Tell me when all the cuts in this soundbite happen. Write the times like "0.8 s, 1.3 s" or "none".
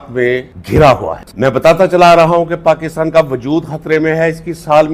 1.3 s